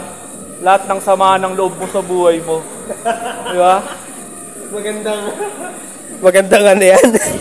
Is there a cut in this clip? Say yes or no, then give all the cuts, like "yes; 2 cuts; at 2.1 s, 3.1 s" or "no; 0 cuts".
no; 0 cuts